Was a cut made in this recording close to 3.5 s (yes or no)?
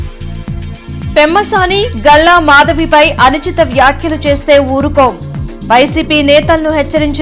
no